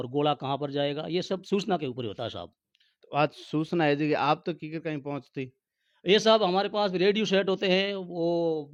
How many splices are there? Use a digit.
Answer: 0